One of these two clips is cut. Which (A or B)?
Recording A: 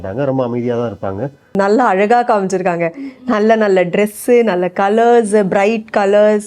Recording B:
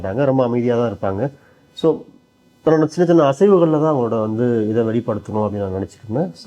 A